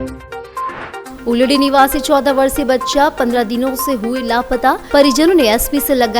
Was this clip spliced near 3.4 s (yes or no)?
no